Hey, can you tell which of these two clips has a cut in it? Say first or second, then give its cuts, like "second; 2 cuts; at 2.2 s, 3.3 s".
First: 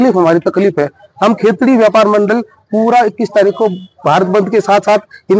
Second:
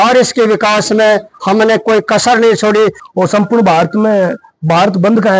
second; 1 cut; at 3.0 s